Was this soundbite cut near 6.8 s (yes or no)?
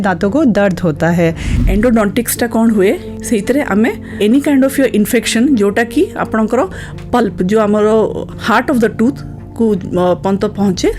no